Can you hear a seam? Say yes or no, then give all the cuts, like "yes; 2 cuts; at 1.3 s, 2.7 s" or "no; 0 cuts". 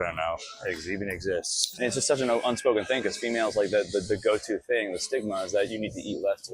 yes; 1 cut; at 1.7 s